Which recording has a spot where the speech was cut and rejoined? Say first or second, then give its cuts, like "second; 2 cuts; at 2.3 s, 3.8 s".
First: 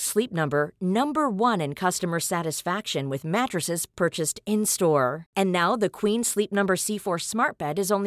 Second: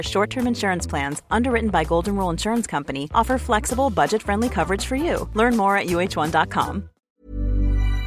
second; 1 cut; at 7.0 s